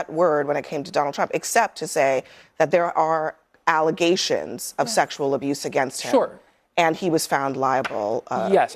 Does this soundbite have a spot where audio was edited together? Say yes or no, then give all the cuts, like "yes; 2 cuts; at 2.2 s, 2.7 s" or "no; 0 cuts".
no; 0 cuts